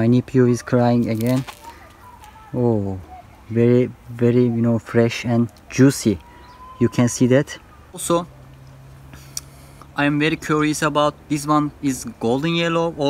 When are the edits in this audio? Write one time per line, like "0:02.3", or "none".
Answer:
0:08.0